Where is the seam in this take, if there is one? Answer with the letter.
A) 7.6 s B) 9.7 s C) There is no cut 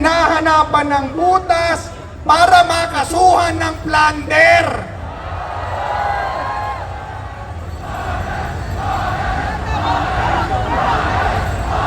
A